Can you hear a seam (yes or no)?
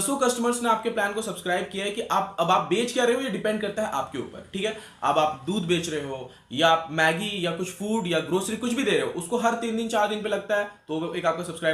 no